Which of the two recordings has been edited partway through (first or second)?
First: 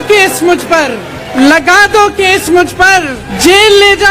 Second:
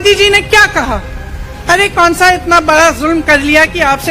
first